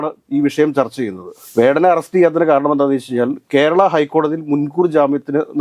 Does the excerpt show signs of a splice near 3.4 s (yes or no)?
no